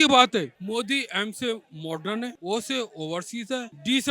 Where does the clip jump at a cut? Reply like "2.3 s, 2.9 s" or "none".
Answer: 2.3 s